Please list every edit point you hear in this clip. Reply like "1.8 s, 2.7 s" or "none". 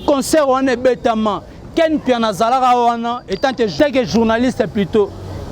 3.8 s